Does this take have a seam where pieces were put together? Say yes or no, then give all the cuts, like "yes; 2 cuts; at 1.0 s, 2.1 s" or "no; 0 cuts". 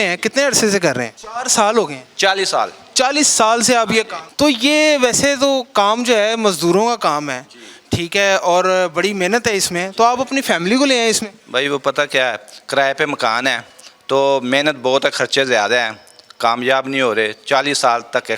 no; 0 cuts